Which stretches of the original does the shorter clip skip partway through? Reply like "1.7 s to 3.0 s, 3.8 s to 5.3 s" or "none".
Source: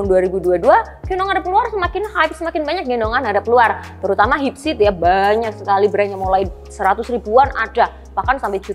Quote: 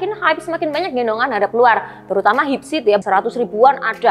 5.0 s to 6.8 s